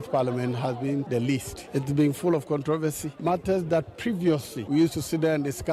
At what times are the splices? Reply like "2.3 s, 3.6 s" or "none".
1.2 s, 4.5 s